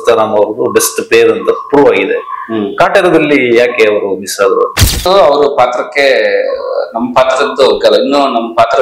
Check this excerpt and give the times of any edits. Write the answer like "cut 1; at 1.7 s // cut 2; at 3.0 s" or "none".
cut 1; at 5.0 s